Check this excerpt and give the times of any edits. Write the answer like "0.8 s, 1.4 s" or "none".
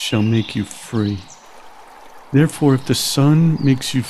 none